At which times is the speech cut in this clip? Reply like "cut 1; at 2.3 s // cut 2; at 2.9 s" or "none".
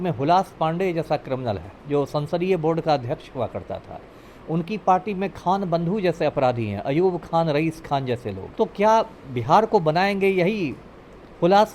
cut 1; at 8.4 s